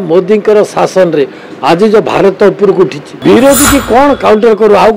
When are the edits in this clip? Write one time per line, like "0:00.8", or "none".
0:03.1